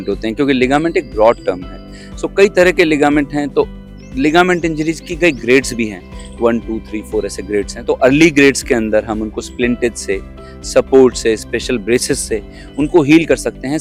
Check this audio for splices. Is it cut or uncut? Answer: uncut